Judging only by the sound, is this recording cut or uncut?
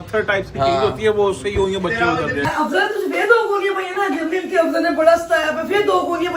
cut